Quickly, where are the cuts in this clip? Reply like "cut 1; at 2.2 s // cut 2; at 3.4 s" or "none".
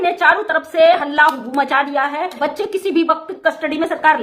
cut 1; at 2.4 s